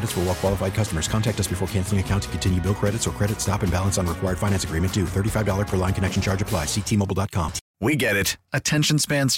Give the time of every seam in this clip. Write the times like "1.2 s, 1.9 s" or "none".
7.6 s